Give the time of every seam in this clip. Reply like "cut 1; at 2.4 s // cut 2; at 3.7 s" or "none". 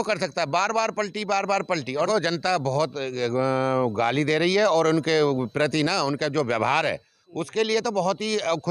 cut 1; at 2.1 s